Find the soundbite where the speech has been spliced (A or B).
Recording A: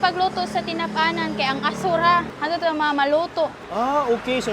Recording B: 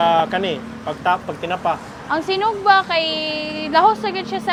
A